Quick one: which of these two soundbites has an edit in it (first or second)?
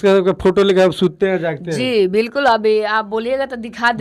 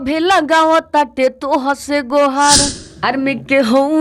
second